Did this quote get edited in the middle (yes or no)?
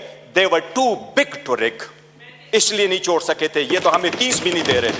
no